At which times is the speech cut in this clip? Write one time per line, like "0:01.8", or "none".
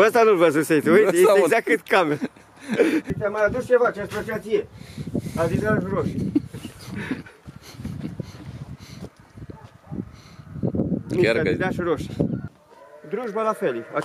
0:03.1
0:12.4